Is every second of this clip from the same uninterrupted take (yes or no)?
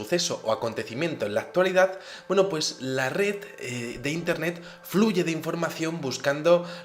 yes